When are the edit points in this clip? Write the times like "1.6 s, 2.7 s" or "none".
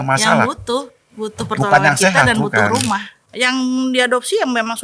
3.2 s